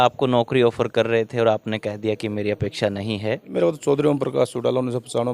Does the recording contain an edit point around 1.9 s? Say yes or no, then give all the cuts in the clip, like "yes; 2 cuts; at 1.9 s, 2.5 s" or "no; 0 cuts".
no; 1 cut; at 3.5 s